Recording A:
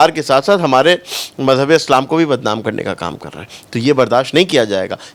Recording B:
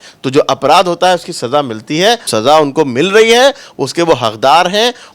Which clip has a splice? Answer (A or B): B